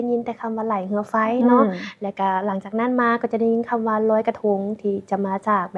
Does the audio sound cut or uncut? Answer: uncut